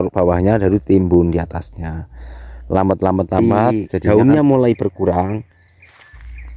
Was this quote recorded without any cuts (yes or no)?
no